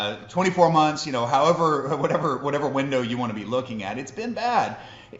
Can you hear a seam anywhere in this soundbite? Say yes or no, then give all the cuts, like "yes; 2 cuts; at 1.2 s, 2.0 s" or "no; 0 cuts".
no; 0 cuts